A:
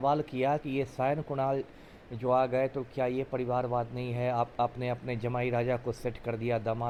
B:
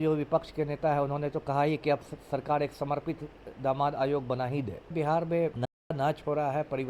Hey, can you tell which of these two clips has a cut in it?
B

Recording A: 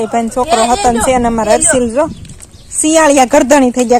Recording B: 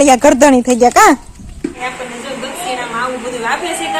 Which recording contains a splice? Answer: B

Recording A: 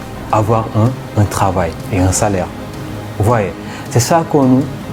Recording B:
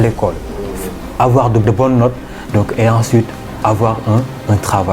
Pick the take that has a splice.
B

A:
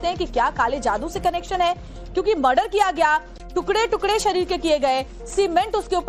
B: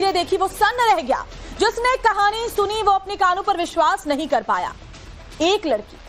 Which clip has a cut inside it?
B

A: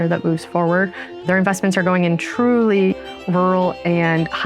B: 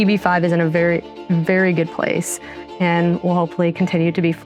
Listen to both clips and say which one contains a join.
A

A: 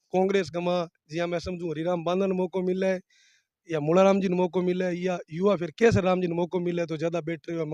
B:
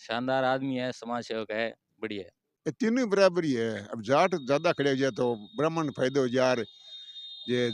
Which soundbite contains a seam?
B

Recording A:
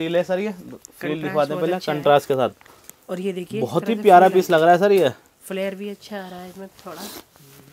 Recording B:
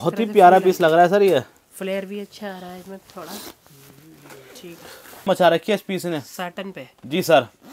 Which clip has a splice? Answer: B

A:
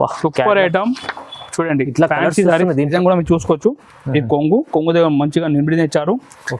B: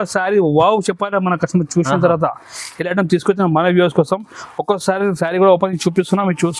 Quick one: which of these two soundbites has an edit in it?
A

